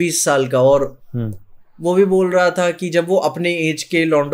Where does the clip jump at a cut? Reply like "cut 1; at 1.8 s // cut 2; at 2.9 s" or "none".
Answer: none